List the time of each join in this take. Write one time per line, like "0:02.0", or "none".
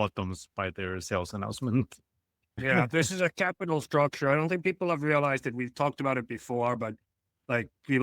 0:02.6